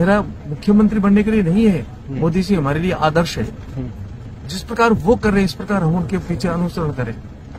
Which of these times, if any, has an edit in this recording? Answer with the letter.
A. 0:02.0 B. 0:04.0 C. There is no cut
C